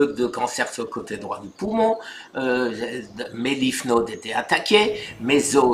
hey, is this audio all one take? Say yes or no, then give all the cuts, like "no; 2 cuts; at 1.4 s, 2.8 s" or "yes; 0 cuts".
yes; 0 cuts